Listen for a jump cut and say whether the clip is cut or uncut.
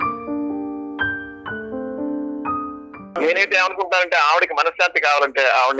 cut